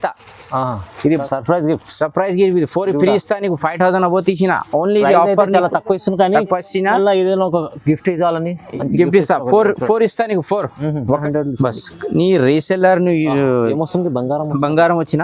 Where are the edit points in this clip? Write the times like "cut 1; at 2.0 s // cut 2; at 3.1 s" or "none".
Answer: cut 1; at 1.1 s // cut 2; at 11.2 s